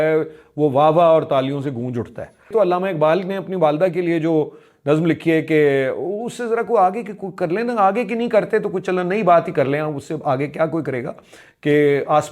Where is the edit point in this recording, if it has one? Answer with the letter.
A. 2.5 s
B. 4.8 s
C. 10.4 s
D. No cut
A